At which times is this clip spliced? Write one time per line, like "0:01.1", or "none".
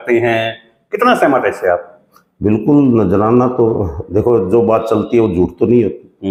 none